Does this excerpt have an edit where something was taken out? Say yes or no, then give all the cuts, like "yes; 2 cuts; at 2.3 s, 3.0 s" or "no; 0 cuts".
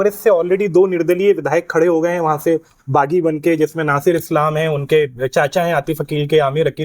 no; 0 cuts